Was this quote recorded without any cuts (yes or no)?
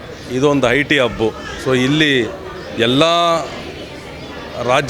yes